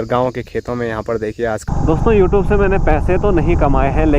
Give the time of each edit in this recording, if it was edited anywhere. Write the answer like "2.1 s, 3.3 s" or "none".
1.6 s